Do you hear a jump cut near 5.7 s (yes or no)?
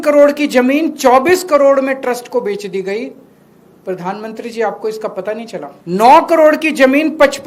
yes